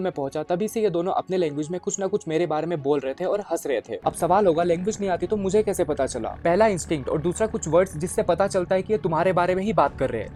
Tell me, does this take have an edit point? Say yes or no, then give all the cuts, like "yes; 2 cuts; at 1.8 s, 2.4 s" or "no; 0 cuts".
no; 0 cuts